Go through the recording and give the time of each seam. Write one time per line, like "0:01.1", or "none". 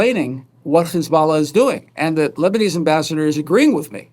0:02.3